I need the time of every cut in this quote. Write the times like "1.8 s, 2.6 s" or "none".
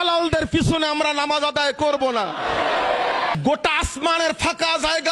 3.3 s